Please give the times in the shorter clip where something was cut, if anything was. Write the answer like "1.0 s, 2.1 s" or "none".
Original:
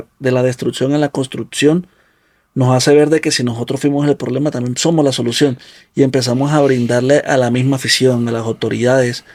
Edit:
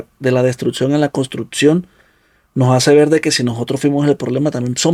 none